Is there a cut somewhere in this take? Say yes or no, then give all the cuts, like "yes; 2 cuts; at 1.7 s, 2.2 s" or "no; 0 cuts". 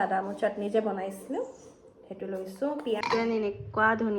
yes; 1 cut; at 3.0 s